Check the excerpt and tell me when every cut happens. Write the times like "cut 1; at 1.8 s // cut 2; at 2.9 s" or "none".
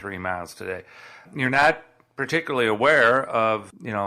cut 1; at 1.2 s